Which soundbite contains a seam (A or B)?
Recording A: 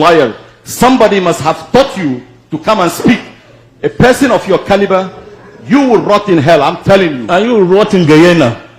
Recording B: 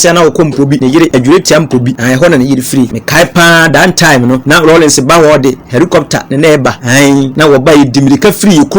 B